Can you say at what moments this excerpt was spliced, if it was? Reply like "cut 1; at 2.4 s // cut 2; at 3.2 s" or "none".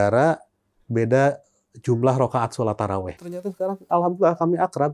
cut 1; at 3.2 s